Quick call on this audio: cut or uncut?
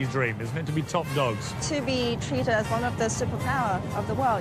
cut